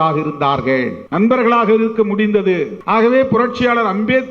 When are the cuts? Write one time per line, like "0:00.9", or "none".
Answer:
0:01.0
0:02.7